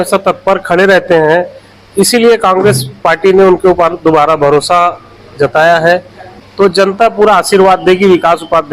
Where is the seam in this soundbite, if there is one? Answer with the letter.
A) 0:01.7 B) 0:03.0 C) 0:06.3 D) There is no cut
C